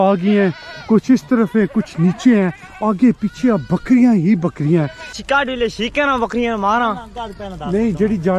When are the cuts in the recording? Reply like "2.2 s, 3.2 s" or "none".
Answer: 5.2 s